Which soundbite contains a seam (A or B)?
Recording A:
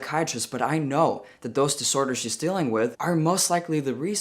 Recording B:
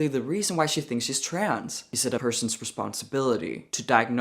B